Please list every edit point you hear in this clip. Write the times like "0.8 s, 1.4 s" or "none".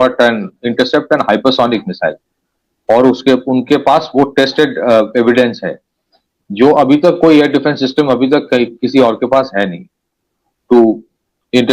none